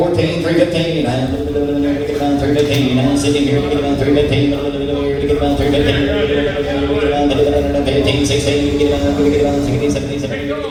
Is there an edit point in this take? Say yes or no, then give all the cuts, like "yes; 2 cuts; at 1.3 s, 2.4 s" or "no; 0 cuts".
no; 0 cuts